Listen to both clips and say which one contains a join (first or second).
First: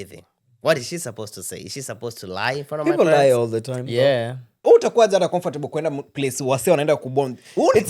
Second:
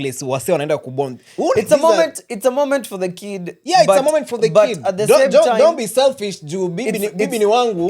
first